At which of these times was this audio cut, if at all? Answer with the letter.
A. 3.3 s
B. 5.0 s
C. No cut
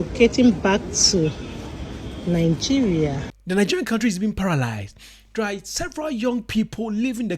A